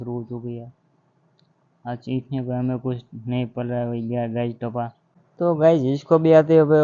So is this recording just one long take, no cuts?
yes; 0 cuts

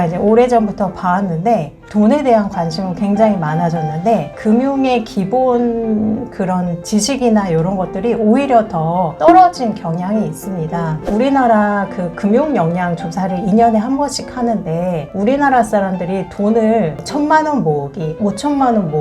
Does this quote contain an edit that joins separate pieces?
yes; 1 cut; at 11.0 s

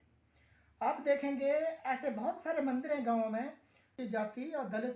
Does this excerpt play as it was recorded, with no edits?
no; 1 cut; at 3.9 s

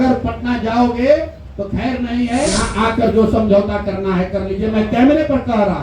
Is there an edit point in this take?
yes; 1 cut; at 2.6 s

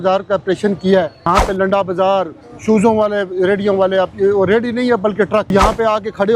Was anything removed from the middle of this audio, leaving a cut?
yes; 2 cuts; at 1.3 s, 5.5 s

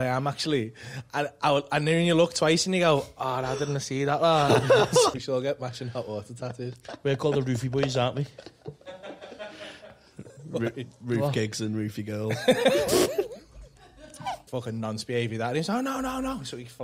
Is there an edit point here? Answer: yes; 2 cuts; at 5.1 s, 14.5 s

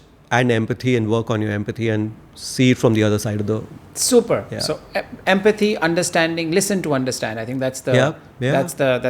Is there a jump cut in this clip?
no; 0 cuts

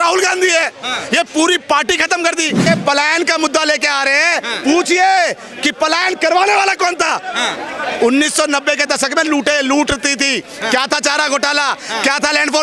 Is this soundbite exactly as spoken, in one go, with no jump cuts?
no; 1 cut; at 2.6 s

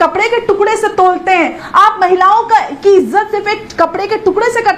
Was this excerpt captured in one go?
no; 1 cut; at 1.6 s

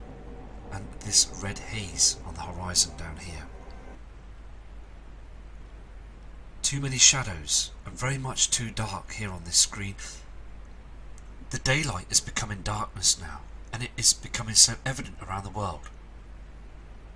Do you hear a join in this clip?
no; 0 cuts

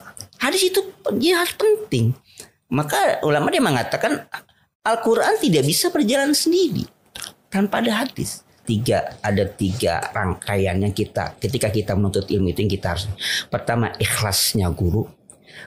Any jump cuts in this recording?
yes; 1 cut; at 8.6 s

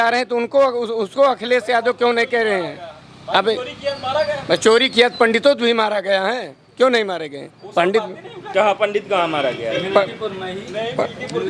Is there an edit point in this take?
no; 0 cuts

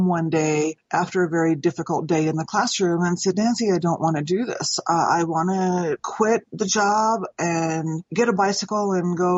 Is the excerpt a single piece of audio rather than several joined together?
no; 1 cut; at 6.0 s

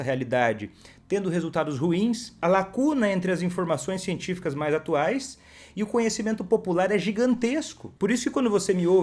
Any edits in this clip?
yes; 2 cuts; at 2.4 s, 7.8 s

